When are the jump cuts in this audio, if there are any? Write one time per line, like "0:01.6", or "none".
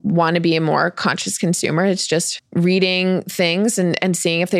0:02.4